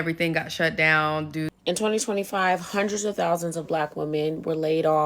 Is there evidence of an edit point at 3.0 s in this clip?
no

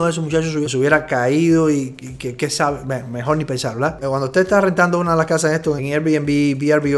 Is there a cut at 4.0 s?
yes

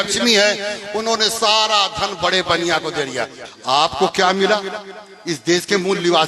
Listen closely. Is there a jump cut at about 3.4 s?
yes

